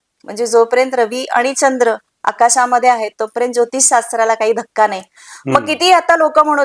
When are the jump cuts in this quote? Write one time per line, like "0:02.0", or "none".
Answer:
none